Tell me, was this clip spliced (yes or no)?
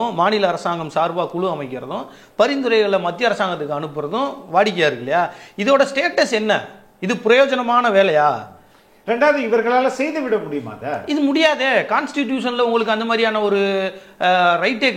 no